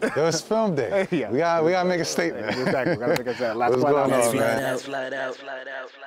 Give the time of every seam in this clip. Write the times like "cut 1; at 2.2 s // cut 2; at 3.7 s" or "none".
none